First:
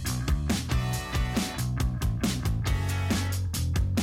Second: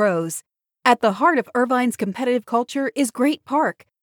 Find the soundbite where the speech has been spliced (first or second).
first